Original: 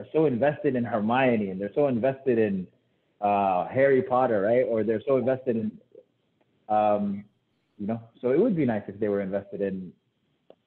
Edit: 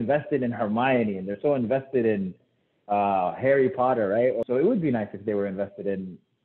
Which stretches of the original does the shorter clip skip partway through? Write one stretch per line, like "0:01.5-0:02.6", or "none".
0:04.7-0:08.2